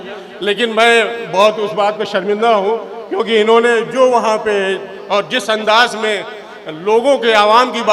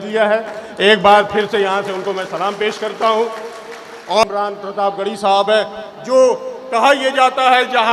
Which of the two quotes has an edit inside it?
second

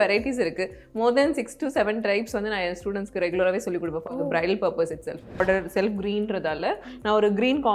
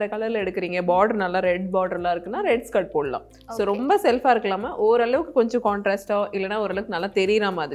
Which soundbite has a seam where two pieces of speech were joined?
first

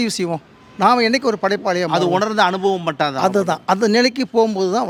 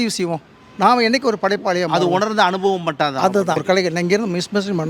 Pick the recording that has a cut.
second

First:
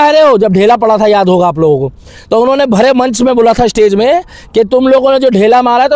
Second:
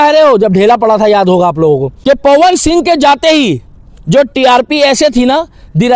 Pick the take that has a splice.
second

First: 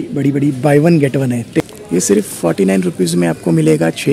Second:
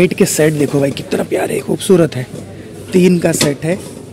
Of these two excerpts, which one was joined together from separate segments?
first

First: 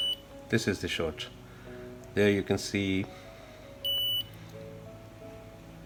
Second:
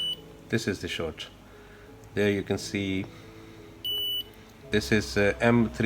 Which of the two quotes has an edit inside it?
second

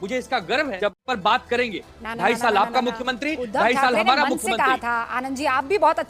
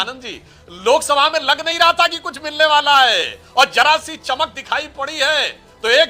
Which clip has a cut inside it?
first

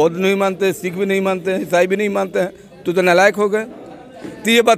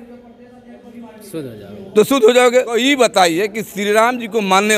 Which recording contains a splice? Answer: second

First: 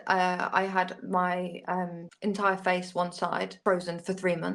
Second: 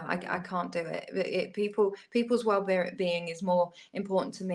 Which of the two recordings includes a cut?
first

